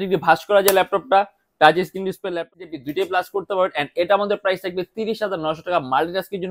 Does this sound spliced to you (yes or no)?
yes